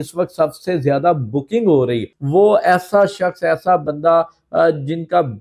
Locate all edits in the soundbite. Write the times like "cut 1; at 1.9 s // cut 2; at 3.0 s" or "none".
cut 1; at 2.1 s